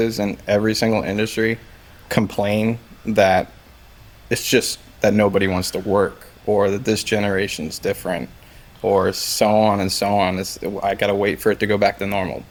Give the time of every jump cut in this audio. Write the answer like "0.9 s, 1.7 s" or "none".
none